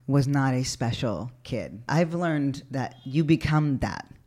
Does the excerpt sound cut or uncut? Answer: cut